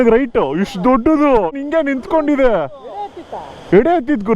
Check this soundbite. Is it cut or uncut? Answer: cut